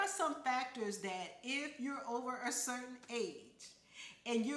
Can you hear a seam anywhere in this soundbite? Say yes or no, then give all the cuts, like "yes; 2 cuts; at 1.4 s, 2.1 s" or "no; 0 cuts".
no; 0 cuts